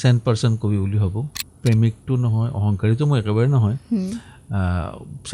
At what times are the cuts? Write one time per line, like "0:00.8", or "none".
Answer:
0:01.3